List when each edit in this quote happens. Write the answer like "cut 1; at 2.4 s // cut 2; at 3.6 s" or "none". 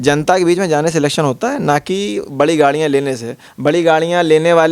none